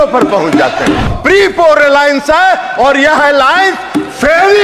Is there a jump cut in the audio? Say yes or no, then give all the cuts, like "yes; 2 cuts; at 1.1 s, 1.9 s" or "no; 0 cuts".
yes; 1 cut; at 1.1 s